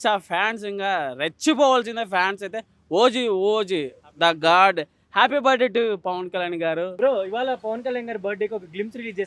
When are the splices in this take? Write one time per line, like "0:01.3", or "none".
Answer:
none